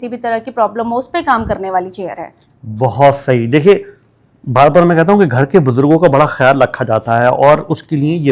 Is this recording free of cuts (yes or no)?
yes